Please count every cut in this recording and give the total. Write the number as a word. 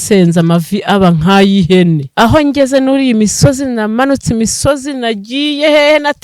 one